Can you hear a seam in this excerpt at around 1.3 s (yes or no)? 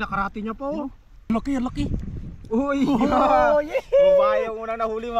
yes